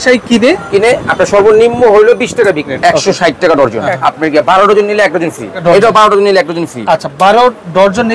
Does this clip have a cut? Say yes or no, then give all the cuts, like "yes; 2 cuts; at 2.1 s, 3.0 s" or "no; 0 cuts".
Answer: yes; 3 cuts; at 2.7 s, 3.9 s, 5.6 s